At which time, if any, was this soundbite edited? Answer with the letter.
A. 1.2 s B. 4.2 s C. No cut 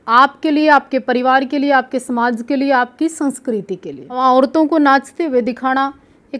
B